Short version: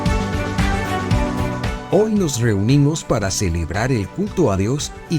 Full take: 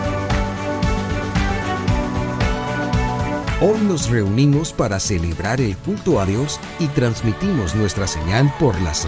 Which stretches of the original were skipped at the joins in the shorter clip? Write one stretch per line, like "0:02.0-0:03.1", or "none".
0:02.6-0:03.5